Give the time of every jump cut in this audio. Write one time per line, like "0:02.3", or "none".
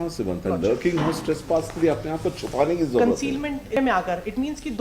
0:03.8